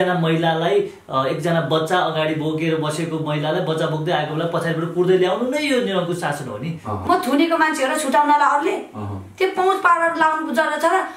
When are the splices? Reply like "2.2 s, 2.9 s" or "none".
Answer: 7.0 s